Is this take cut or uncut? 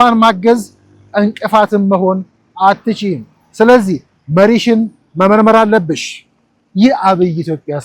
uncut